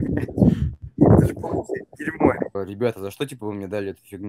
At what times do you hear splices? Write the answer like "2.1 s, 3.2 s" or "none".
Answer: 2.5 s

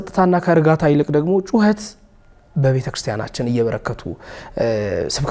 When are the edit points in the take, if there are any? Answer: none

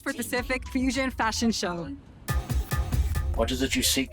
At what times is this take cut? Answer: 3.2 s

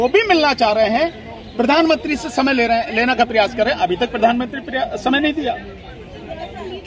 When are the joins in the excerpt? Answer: none

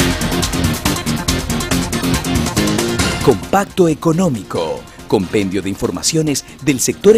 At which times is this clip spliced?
4.9 s

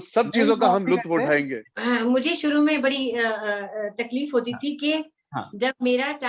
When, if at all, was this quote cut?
1.6 s

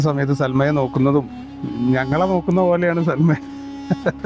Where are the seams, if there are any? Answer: none

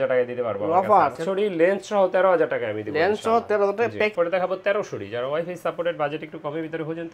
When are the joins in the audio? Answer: 1.2 s, 4.1 s

